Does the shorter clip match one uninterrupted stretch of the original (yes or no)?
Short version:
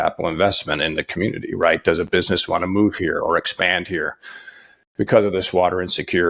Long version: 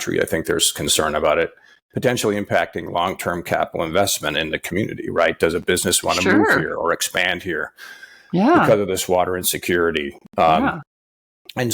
yes